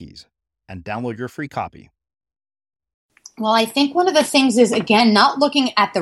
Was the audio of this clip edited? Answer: yes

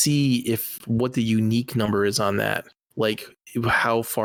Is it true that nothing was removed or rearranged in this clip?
yes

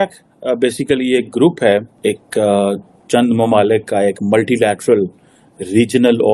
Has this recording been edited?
yes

